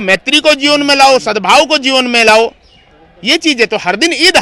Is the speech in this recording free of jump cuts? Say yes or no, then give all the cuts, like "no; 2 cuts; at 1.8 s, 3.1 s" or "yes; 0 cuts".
yes; 0 cuts